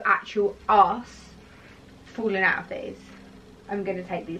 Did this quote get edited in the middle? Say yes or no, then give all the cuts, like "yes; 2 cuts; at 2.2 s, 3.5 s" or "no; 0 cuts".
no; 0 cuts